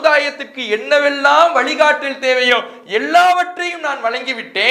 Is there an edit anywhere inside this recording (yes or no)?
no